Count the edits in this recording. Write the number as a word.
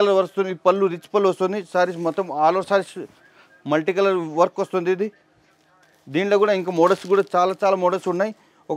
zero